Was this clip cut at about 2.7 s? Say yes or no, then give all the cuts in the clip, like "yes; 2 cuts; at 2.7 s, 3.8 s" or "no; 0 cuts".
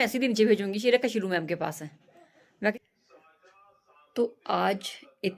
yes; 1 cut; at 2.7 s